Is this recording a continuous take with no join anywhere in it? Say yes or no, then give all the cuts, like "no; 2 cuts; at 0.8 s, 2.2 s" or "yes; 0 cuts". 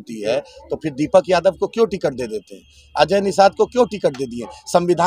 yes; 0 cuts